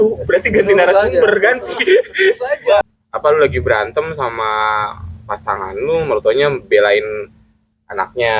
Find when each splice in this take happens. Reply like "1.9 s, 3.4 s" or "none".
3.0 s